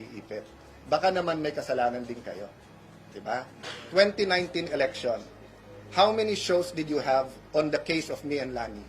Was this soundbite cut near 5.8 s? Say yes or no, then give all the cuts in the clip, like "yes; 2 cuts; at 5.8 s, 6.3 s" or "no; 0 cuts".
no; 1 cut; at 3.6 s